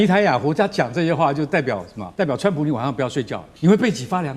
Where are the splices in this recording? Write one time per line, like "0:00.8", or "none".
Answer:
0:02.0
0:03.4